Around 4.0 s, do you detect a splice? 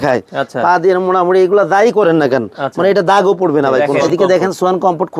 yes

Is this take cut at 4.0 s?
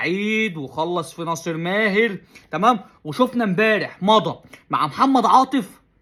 no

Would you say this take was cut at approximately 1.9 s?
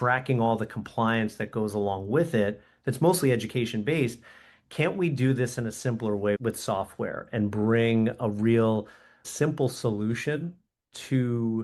no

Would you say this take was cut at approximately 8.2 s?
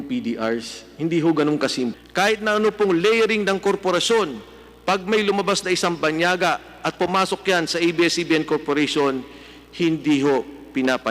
no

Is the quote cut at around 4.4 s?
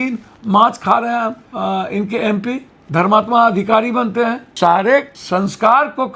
yes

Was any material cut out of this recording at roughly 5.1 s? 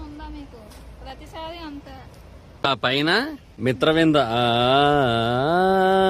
no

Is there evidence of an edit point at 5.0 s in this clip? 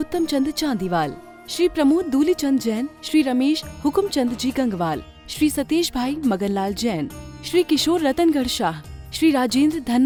no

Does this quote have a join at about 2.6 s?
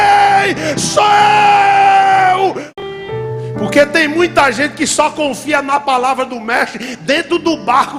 yes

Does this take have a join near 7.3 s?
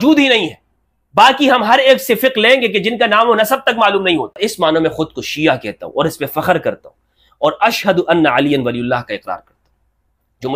no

